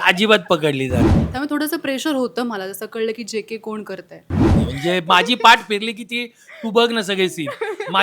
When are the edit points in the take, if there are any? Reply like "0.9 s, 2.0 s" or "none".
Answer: 1.2 s, 4.6 s